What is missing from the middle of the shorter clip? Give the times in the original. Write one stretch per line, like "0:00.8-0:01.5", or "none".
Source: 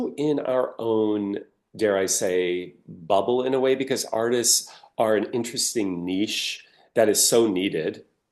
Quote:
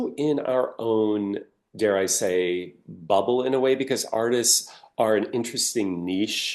none